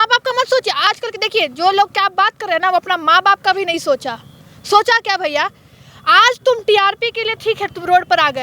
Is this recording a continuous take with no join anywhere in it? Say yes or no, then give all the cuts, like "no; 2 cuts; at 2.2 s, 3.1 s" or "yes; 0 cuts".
yes; 0 cuts